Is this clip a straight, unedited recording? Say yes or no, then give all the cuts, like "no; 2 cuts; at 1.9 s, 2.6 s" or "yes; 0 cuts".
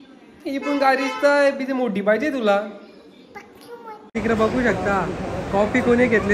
no; 1 cut; at 4.2 s